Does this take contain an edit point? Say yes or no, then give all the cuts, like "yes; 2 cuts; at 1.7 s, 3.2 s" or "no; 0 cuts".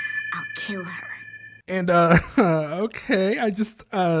no; 0 cuts